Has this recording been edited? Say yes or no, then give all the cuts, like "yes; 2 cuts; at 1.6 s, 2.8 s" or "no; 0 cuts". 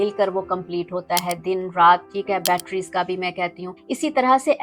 no; 0 cuts